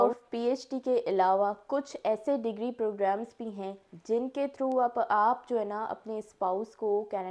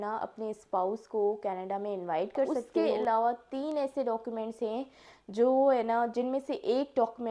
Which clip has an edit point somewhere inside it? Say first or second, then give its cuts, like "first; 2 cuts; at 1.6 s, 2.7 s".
second; 1 cut; at 2.6 s